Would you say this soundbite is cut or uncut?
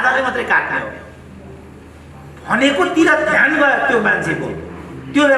uncut